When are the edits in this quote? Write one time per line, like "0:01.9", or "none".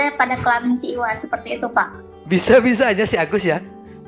none